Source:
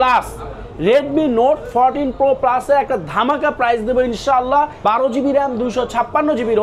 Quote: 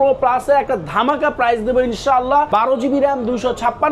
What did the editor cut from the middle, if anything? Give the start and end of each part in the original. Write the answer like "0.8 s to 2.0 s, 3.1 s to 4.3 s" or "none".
4.7 s to 4.8 s